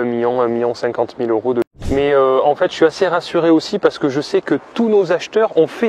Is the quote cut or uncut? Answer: cut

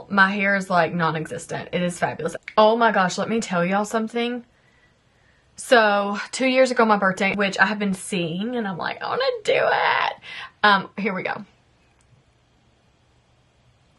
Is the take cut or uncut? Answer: cut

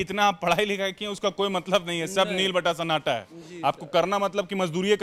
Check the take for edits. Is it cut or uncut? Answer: uncut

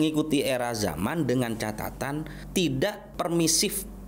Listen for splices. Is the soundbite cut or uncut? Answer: cut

